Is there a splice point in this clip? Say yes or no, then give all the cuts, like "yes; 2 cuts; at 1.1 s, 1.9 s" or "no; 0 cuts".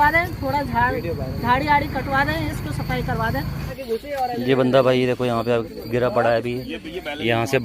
yes; 1 cut; at 3.7 s